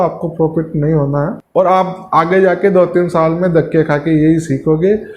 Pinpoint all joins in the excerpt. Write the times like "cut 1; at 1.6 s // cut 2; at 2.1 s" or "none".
cut 1; at 1.4 s